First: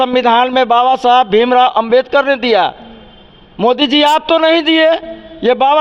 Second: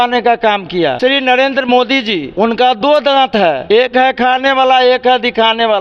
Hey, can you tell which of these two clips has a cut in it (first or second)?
second